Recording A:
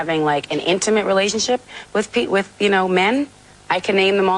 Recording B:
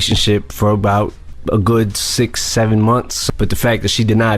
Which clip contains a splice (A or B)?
B